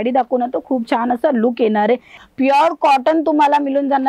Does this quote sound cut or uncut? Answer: cut